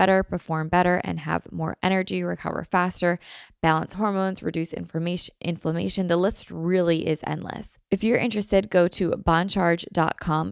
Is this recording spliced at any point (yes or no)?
yes